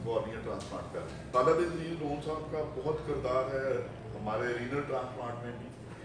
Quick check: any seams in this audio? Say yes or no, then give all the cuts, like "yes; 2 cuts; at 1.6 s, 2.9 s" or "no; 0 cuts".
yes; 1 cut; at 1.2 s